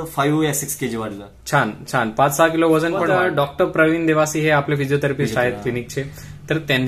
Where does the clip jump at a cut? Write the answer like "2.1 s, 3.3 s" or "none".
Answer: 3.1 s